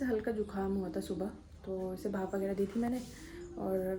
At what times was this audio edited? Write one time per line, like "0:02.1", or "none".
none